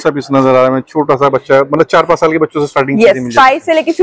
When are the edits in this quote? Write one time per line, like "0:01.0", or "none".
none